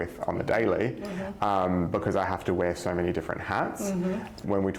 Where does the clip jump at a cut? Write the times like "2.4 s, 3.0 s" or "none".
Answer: none